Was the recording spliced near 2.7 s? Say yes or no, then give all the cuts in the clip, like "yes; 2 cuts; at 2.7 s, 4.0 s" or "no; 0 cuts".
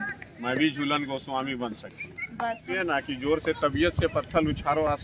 yes; 1 cut; at 2.7 s